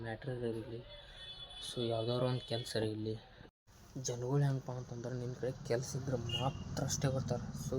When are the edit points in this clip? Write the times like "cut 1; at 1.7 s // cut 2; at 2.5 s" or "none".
cut 1; at 3.4 s